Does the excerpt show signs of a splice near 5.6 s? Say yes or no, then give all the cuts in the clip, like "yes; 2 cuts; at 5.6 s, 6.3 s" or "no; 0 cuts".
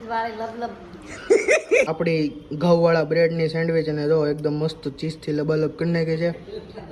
no; 2 cuts; at 1.1 s, 1.9 s